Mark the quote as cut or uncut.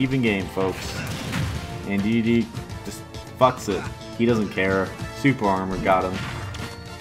uncut